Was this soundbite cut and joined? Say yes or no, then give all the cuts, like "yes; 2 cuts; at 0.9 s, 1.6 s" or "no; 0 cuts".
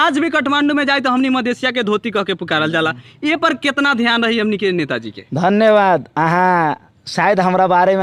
no; 0 cuts